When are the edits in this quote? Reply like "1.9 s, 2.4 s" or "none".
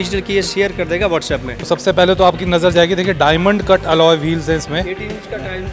1.5 s